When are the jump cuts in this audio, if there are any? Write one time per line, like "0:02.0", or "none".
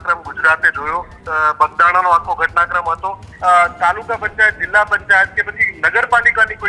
0:01.2
0:03.3

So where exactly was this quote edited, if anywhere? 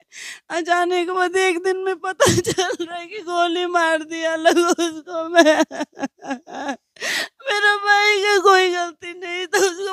none

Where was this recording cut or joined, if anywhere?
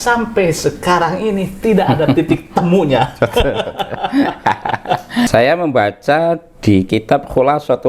0:05.3

